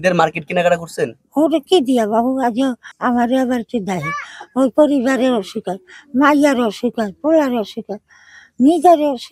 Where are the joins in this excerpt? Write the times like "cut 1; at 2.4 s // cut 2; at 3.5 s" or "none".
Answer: cut 1; at 2.9 s